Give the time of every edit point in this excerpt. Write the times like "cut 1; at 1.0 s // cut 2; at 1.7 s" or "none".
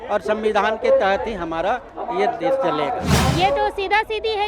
cut 1; at 3.1 s

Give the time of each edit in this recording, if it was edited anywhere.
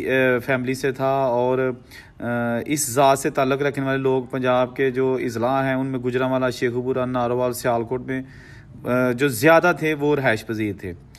none

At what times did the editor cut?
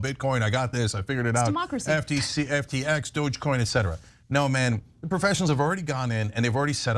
none

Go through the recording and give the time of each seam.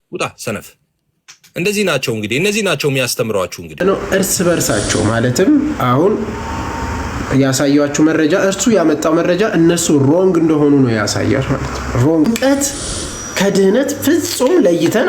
cut 1; at 3.8 s // cut 2; at 12.3 s

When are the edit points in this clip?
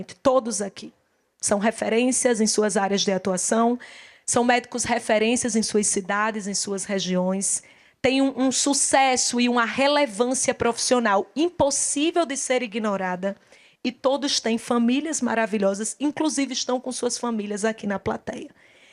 none

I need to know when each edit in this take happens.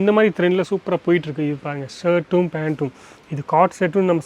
none

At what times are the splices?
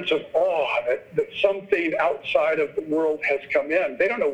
none

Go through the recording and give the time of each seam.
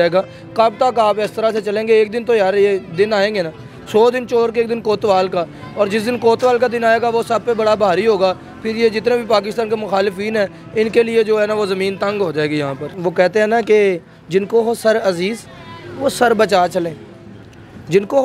cut 1; at 12.8 s

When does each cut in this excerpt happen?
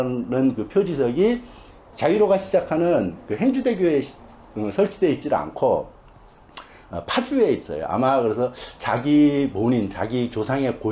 none

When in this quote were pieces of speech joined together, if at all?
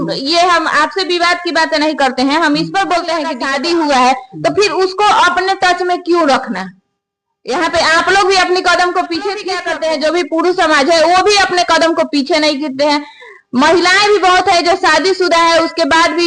cut 1; at 3.4 s // cut 2; at 9.6 s

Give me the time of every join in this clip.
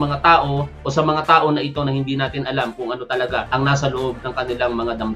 cut 1; at 3.5 s // cut 2; at 4.2 s

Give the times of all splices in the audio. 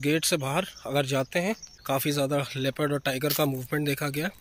cut 1; at 1.7 s

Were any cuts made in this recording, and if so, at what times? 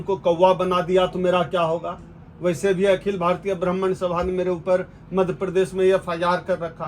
none

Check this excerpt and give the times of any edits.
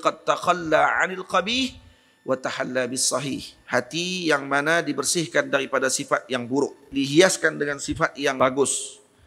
cut 1; at 6.9 s // cut 2; at 8.4 s

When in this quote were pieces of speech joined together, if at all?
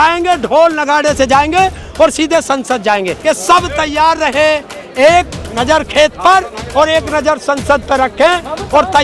cut 1; at 3.1 s

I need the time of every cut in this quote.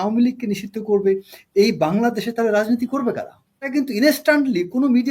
cut 1; at 3.6 s

